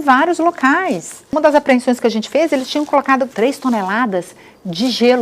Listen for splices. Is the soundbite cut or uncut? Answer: cut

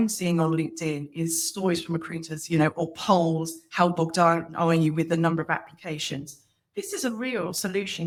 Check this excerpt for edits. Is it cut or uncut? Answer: uncut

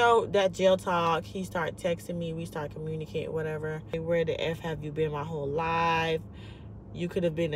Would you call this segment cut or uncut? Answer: cut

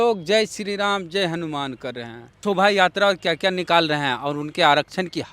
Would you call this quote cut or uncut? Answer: cut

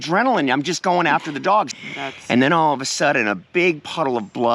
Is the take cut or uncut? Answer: cut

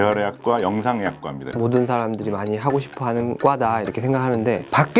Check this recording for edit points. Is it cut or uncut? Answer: cut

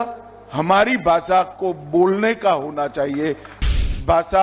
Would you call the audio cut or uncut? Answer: cut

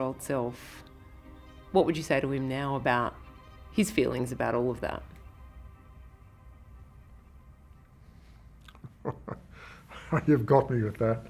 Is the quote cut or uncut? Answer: uncut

